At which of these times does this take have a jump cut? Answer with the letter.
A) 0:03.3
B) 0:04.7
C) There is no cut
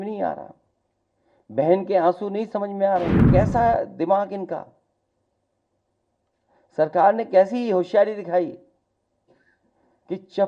A